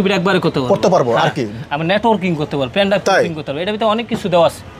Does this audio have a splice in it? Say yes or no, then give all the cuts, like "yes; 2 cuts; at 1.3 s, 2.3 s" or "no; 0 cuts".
no; 0 cuts